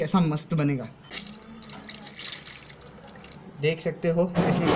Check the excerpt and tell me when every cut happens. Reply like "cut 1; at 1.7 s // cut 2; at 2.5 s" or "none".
cut 1; at 1.1 s // cut 2; at 3.3 s